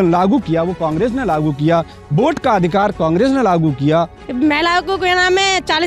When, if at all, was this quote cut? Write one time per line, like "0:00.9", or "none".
0:04.2